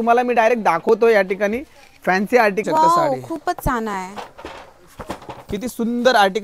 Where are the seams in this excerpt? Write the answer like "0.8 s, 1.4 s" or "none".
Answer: 2.6 s